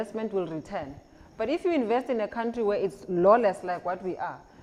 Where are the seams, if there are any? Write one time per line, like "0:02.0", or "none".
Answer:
none